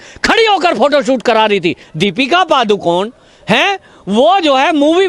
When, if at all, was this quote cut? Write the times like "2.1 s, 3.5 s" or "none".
1.8 s